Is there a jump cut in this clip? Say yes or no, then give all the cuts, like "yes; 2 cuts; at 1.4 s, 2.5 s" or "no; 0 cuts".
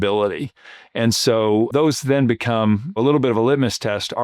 yes; 2 cuts; at 1.7 s, 3.0 s